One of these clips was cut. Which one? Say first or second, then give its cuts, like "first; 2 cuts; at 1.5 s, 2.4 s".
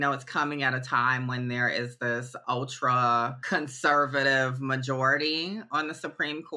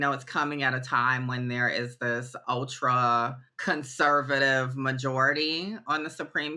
first; 1 cut; at 3.4 s